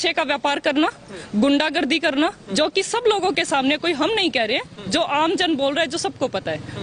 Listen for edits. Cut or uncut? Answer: uncut